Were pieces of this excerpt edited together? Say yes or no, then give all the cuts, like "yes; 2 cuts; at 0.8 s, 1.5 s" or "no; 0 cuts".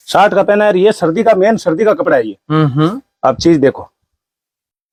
no; 0 cuts